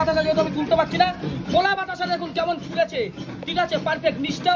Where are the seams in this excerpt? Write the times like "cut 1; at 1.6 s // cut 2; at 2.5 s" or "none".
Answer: none